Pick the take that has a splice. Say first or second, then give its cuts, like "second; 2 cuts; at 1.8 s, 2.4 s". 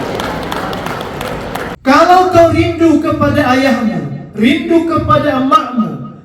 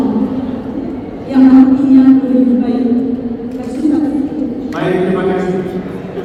first; 1 cut; at 1.7 s